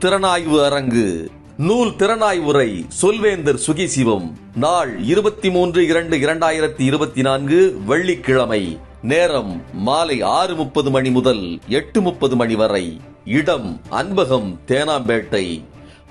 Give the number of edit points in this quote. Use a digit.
0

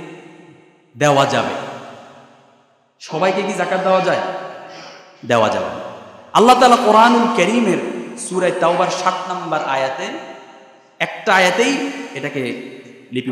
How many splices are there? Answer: 0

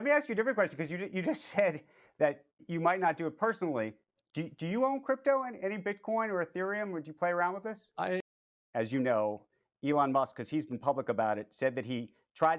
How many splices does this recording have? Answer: 1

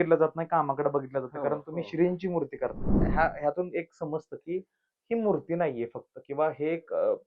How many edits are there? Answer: 1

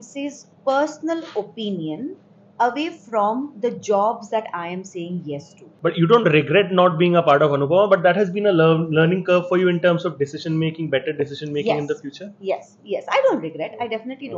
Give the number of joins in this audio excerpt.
1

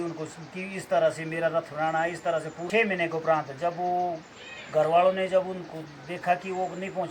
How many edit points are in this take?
1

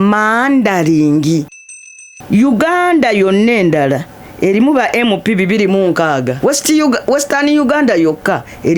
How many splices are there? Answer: 2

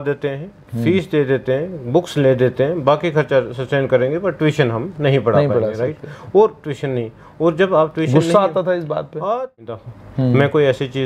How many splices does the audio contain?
1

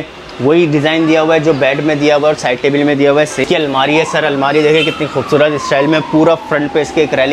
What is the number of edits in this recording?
1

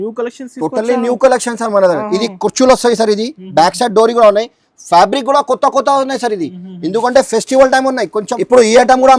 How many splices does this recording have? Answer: 1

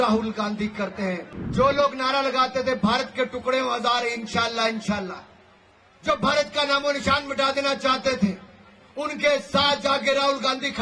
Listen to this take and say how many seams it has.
1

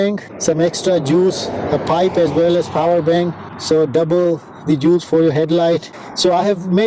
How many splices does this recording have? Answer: 1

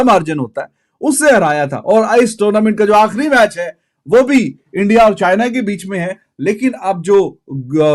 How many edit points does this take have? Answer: 0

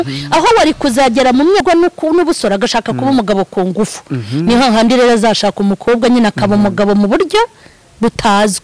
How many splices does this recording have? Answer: 1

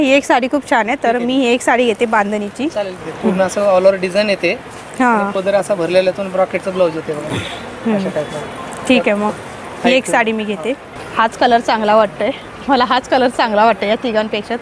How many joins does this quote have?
2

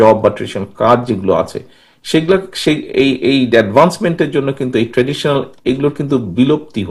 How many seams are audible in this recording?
0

